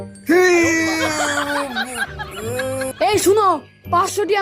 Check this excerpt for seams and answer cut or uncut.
cut